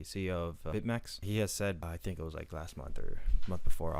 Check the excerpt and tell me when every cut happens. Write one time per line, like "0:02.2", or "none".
0:01.2
0:01.8